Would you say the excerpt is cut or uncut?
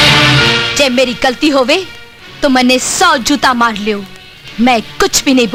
uncut